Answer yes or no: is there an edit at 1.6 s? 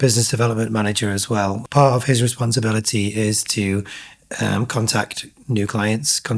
yes